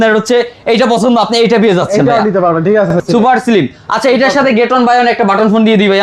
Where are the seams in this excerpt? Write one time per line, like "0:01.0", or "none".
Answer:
0:02.9